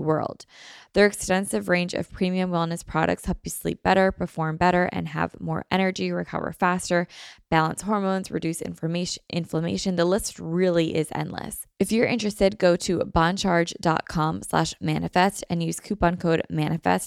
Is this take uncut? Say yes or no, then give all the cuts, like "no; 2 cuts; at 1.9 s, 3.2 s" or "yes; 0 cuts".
no; 1 cut; at 11.6 s